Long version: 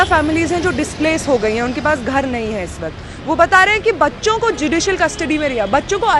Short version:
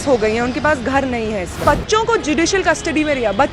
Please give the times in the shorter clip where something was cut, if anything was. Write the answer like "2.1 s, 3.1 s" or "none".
1.6 s